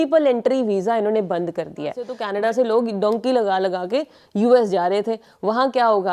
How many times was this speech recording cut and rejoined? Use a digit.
1